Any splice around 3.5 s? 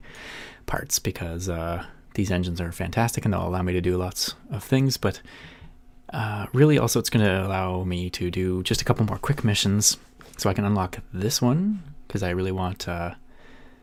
no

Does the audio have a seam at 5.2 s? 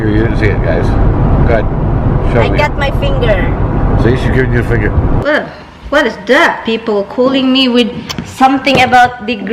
yes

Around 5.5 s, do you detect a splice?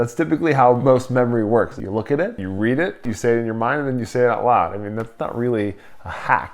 no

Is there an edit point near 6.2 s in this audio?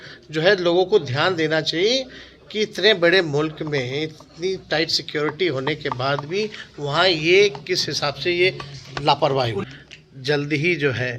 no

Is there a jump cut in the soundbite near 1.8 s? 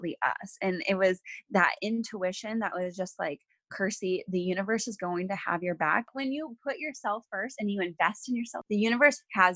no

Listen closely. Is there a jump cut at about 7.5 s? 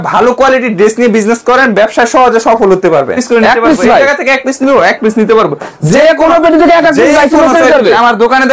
no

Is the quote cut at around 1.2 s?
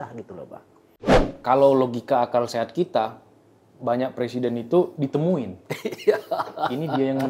yes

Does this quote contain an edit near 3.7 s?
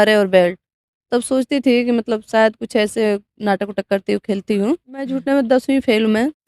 no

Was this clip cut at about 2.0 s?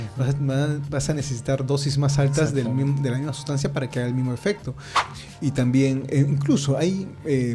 no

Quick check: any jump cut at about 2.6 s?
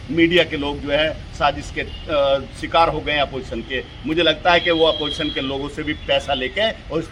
no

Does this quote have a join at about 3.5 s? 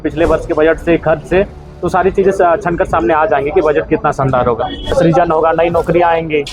no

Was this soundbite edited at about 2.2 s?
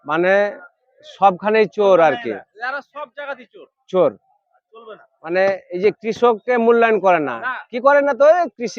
no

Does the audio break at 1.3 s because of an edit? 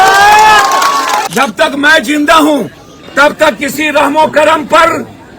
yes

